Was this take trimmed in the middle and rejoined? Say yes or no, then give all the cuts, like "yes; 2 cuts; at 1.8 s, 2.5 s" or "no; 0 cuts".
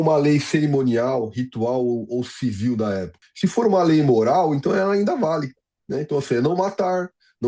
yes; 1 cut; at 3.2 s